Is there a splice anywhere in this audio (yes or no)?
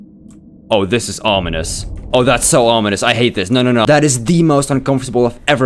yes